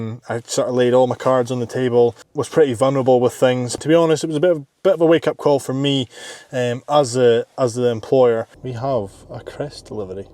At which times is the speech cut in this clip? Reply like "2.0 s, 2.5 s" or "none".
3.7 s, 8.5 s